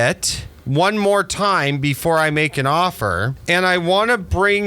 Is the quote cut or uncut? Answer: cut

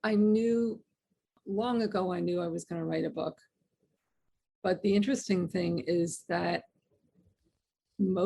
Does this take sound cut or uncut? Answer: cut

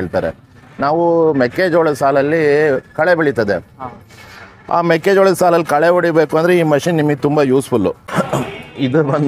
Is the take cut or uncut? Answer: cut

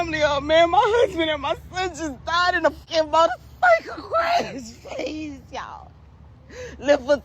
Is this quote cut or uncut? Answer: cut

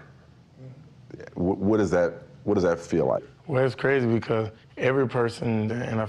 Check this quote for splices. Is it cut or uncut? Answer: uncut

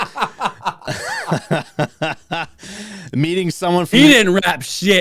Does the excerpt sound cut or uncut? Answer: uncut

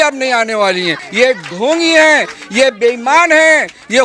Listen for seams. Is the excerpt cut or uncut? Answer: cut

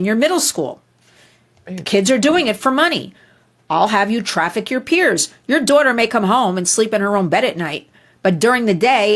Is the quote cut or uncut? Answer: uncut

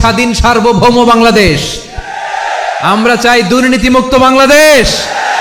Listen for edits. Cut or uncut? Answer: uncut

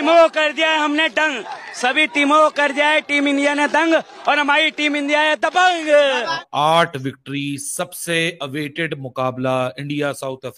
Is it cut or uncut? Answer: cut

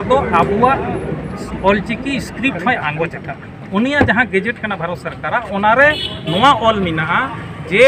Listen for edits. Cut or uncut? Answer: uncut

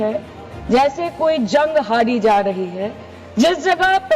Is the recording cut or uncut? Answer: uncut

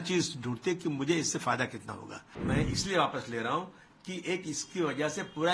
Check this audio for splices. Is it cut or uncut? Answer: cut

